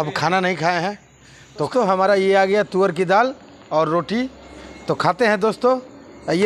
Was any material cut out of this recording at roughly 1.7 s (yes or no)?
yes